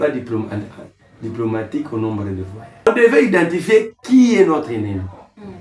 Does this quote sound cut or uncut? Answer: cut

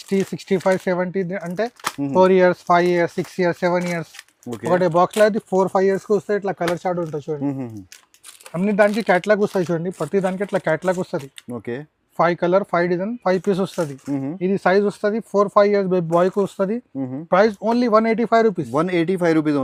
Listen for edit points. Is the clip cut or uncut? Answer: uncut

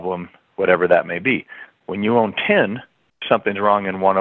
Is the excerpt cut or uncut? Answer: uncut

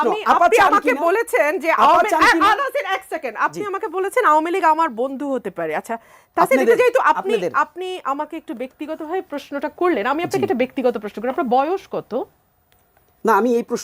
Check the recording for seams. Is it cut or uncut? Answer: uncut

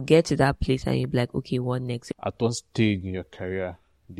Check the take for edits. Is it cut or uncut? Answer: cut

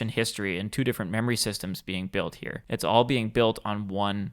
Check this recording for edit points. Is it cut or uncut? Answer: cut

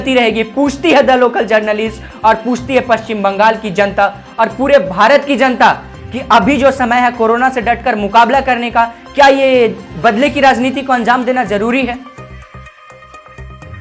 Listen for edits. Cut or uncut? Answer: uncut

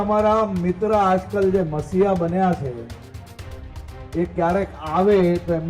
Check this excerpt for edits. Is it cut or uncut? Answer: uncut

